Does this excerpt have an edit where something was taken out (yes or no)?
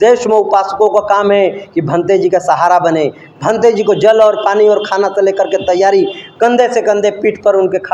no